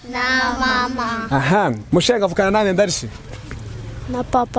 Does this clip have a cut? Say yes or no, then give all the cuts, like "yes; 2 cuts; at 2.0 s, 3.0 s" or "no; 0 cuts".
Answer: yes; 1 cut; at 1.8 s